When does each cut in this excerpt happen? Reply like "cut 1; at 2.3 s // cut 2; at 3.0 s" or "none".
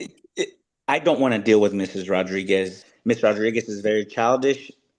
cut 1; at 2.8 s

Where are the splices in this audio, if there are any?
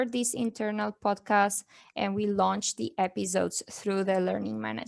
none

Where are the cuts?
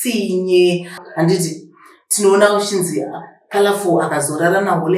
cut 1; at 1.0 s

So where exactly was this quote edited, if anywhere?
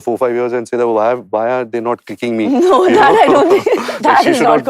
none

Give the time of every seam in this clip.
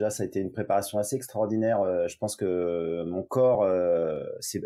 none

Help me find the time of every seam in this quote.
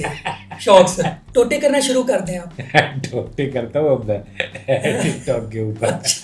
cut 1; at 1.2 s // cut 2; at 2.5 s

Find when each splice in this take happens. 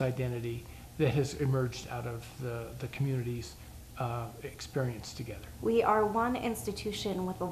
cut 1; at 5.4 s

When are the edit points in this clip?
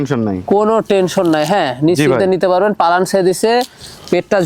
none

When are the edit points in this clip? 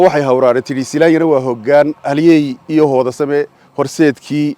none

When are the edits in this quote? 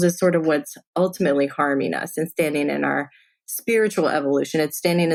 none

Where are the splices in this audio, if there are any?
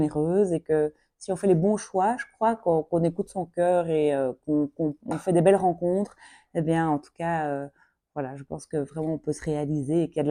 none

